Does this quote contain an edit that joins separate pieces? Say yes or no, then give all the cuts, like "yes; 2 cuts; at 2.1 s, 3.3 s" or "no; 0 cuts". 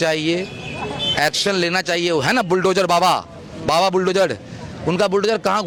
no; 0 cuts